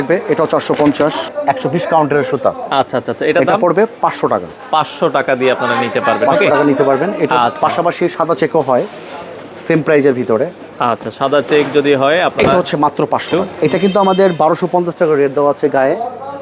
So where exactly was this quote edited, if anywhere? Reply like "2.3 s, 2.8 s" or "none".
1.3 s, 13.4 s

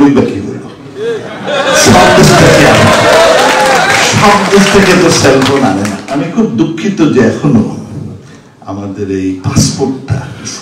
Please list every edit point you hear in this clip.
6.1 s

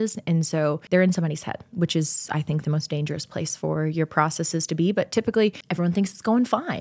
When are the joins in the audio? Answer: 0.8 s, 5.6 s

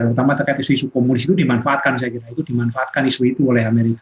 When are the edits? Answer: none

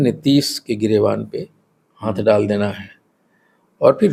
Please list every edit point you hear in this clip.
none

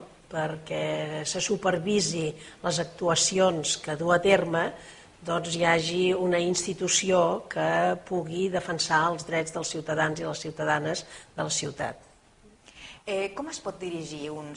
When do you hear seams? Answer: 13.6 s

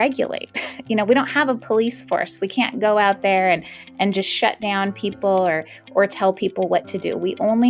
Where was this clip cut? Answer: none

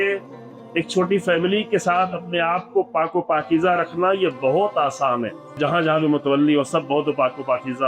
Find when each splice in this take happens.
5.6 s

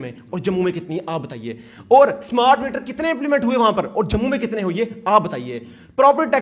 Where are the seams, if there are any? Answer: none

